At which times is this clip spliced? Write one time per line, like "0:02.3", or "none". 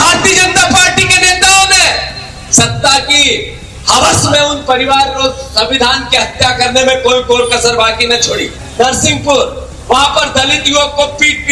0:08.6